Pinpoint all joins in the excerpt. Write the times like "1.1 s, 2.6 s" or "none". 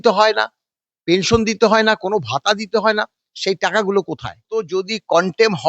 4.4 s